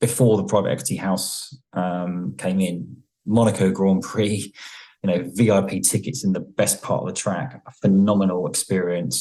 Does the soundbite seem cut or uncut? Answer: uncut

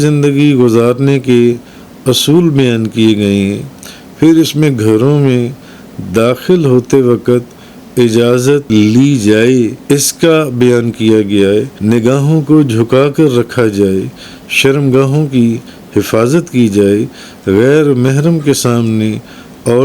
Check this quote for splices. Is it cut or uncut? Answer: cut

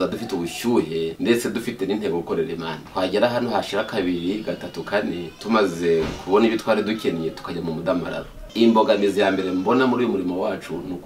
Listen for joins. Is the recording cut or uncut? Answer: cut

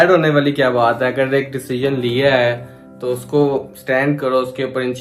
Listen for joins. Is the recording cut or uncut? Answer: uncut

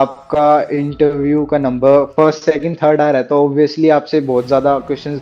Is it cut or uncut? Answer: uncut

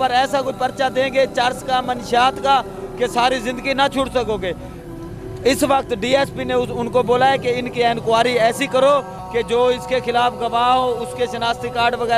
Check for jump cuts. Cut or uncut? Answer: uncut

